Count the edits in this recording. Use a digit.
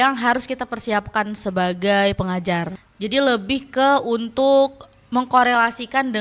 1